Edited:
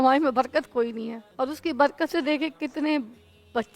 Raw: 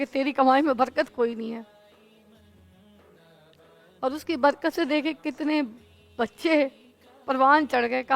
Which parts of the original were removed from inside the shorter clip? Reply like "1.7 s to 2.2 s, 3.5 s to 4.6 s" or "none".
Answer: 1.6 s to 3.8 s